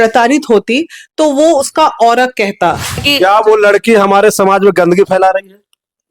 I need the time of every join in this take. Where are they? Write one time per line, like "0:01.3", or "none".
0:03.1

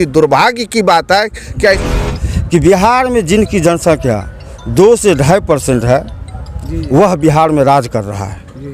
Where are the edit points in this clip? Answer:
0:01.8

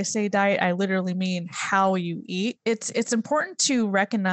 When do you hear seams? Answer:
0:02.6

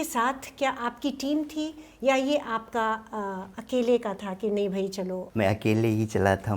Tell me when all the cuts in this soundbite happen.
0:05.2

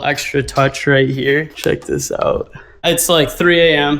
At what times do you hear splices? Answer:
0:02.8

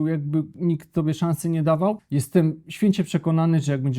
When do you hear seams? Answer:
0:02.0

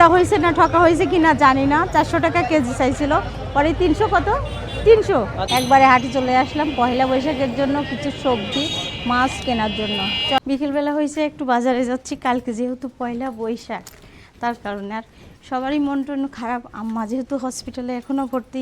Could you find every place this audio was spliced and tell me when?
0:05.4
0:10.4

